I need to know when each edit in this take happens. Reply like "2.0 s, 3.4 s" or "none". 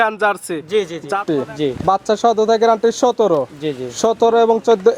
1.2 s